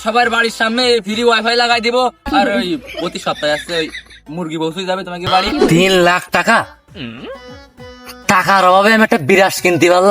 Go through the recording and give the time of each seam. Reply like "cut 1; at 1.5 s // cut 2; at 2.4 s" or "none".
cut 1; at 5.6 s